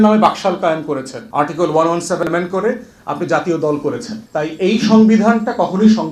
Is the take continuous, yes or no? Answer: no